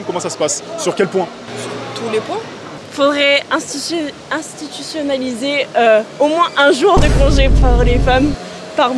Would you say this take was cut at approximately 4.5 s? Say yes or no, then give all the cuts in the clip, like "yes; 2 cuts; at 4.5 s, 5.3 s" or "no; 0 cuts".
no; 1 cut; at 2.8 s